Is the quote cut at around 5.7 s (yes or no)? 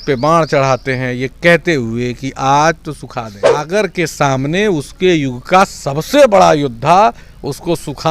no